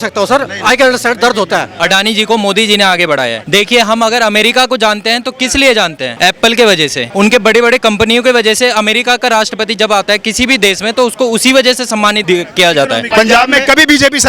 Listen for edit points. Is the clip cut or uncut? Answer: cut